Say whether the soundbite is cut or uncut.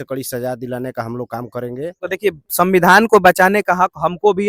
cut